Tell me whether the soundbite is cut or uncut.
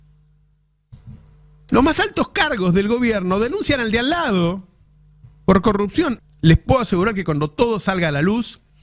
cut